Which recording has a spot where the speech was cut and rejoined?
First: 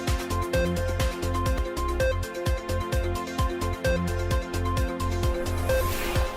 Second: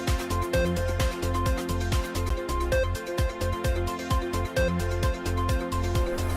first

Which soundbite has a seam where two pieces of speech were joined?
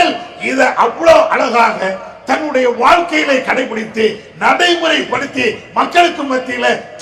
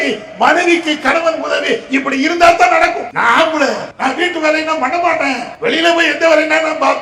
second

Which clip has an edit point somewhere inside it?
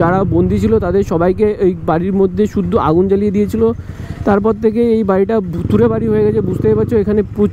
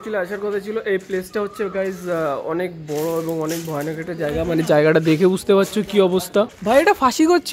second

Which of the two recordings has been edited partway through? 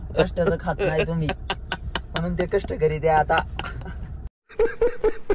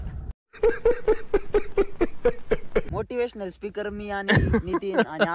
second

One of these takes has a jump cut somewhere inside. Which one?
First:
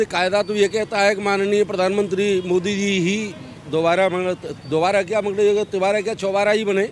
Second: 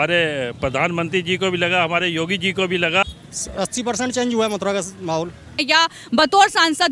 second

